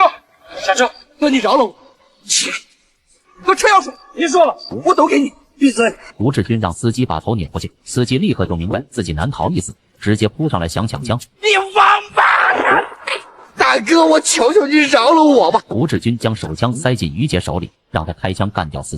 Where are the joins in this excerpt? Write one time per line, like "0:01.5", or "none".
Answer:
0:01.2